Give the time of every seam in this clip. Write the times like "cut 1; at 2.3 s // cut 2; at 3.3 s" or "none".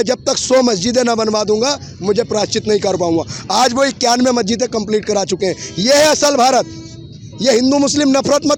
none